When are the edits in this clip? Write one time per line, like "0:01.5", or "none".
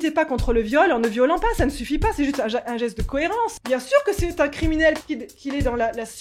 0:03.6
0:05.0